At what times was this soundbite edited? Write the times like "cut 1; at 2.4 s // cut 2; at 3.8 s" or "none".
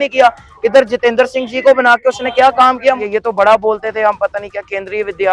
cut 1; at 3.0 s